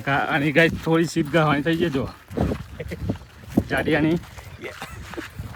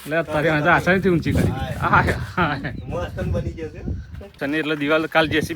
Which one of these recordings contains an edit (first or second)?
second